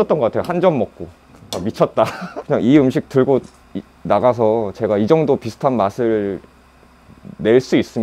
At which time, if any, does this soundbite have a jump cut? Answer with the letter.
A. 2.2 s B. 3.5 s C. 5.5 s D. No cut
A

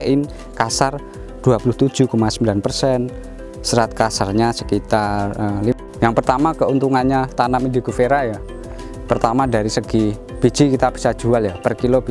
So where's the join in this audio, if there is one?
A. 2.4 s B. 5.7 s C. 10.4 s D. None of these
B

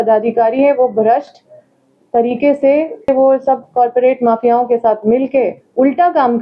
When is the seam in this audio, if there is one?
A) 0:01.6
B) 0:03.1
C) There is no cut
B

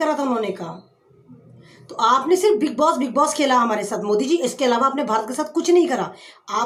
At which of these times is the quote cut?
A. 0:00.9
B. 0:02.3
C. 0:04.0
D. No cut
D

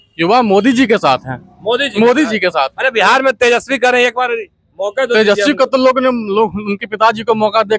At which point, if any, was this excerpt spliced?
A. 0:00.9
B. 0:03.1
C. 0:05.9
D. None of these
D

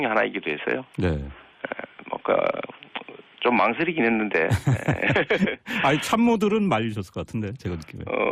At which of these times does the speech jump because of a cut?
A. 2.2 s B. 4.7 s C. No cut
A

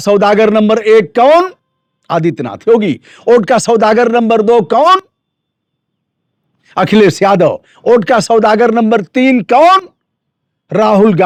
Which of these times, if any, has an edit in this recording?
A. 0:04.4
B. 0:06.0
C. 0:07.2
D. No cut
D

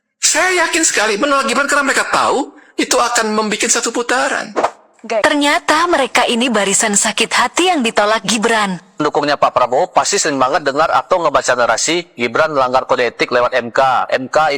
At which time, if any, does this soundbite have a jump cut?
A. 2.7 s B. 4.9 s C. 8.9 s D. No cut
B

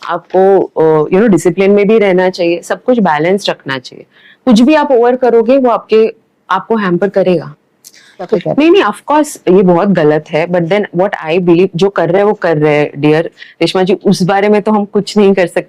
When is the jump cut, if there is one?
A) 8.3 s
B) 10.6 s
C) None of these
A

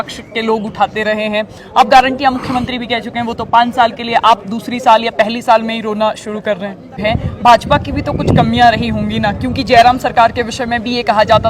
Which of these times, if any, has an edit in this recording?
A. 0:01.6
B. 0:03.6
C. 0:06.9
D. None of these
C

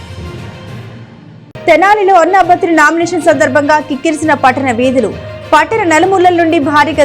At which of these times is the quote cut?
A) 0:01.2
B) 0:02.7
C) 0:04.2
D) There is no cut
A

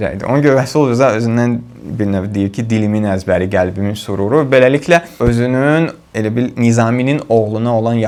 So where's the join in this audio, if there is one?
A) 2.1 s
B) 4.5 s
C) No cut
C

